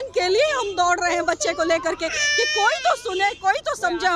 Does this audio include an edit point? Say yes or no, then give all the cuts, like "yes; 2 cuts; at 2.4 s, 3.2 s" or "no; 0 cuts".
no; 0 cuts